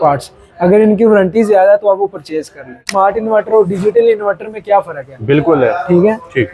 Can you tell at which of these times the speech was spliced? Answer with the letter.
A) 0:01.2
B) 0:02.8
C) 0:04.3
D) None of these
B